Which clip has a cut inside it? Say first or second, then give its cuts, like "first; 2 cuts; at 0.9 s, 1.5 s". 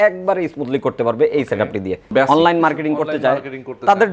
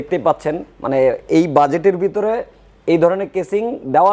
first; 1 cut; at 2.1 s